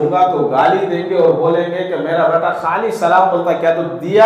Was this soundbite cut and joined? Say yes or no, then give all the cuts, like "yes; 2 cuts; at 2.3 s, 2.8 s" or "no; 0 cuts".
no; 0 cuts